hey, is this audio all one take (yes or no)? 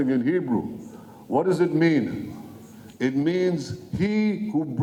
yes